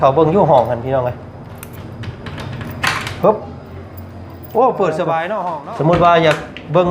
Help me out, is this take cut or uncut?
cut